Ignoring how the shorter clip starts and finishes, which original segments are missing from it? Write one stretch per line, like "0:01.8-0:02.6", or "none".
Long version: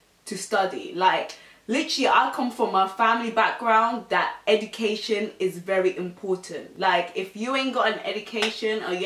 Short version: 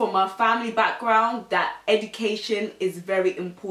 none